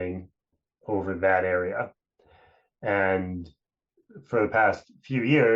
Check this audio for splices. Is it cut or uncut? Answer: uncut